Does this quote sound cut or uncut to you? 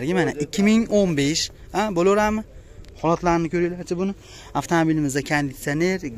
uncut